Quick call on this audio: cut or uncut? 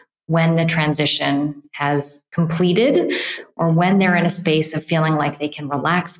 uncut